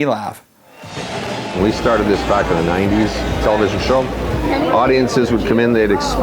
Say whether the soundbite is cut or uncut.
cut